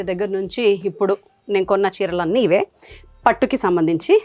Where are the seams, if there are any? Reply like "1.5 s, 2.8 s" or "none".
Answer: none